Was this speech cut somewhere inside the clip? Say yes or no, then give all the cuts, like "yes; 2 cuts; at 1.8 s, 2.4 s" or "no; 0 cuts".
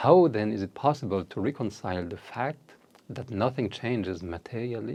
no; 0 cuts